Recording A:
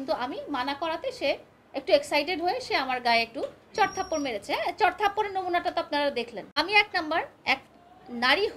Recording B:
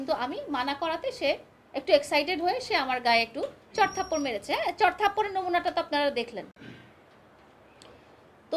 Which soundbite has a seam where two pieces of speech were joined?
A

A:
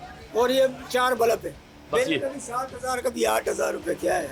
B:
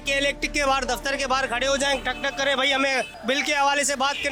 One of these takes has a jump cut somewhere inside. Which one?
B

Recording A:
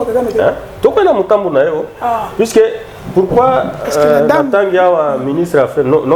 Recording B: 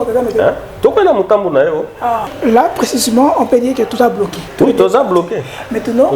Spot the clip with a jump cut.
B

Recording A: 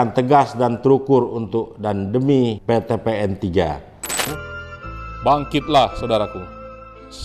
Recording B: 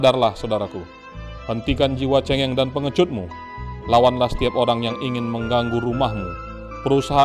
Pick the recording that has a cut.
A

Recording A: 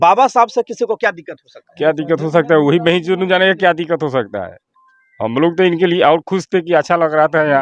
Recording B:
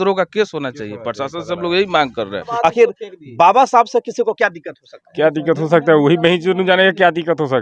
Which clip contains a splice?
B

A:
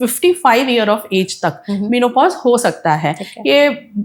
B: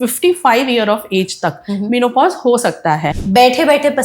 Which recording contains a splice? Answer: B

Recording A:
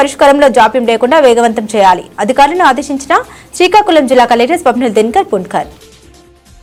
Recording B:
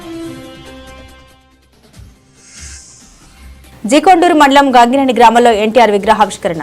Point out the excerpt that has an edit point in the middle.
B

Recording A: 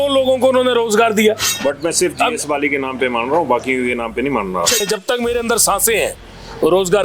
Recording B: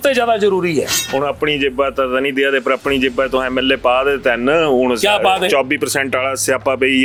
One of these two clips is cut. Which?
A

